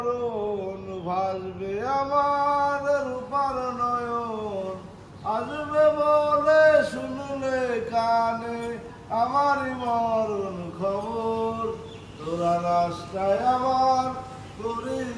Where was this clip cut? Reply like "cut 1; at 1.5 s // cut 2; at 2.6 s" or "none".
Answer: none